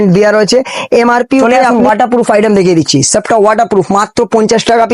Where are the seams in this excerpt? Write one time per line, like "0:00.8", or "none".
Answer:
0:01.4